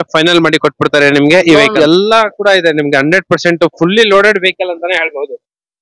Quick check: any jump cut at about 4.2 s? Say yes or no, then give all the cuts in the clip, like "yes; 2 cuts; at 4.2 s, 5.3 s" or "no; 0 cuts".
no; 1 cut; at 1.7 s